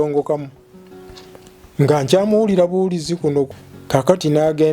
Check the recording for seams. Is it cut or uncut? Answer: cut